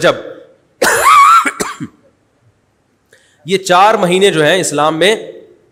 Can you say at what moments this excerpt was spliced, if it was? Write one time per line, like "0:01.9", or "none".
none